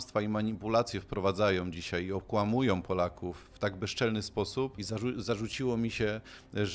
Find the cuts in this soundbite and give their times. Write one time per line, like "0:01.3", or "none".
0:04.8